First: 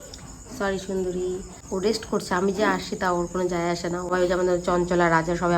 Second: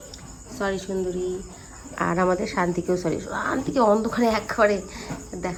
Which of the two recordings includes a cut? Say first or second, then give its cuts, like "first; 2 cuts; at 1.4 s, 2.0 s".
first; 2 cuts; at 1.5 s, 4.1 s